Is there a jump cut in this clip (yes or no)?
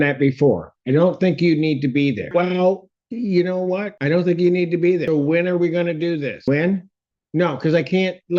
yes